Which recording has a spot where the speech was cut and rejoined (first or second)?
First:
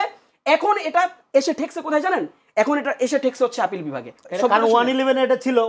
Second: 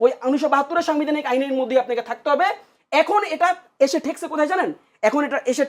first